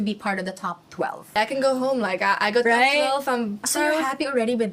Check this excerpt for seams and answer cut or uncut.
cut